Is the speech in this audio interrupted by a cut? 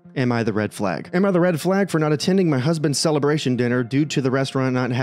yes; 1 cut; at 1.1 s

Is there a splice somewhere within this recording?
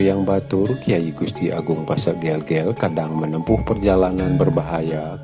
no; 0 cuts

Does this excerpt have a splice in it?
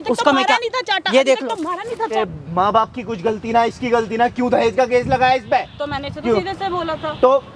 yes; 1 cut; at 2.2 s

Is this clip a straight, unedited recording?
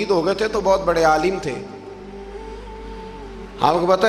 yes; 0 cuts

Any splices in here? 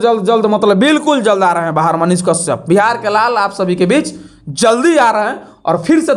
no; 0 cuts

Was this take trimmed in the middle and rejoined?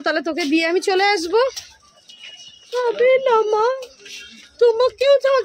no; 0 cuts

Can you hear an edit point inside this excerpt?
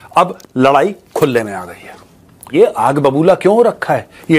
yes; 1 cut; at 2.5 s

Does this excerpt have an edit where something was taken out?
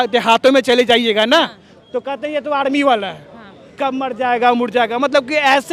no; 0 cuts

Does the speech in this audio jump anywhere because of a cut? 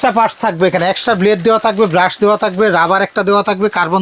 no; 0 cuts

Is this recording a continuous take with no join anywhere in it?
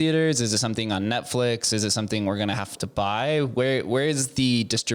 yes; 0 cuts

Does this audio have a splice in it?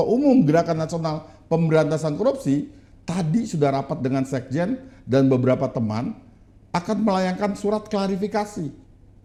no; 0 cuts

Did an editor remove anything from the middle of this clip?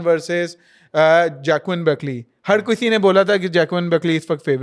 no; 0 cuts

